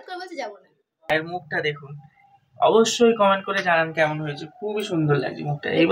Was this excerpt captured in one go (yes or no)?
no